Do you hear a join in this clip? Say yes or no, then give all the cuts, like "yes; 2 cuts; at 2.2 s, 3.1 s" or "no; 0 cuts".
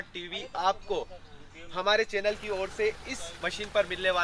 no; 0 cuts